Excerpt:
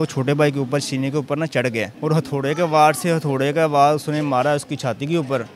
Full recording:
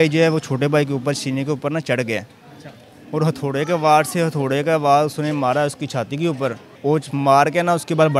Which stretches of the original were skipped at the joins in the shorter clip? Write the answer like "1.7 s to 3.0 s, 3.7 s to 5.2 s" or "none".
2.3 s to 3.0 s